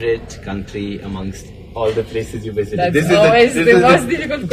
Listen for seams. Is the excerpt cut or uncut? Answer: uncut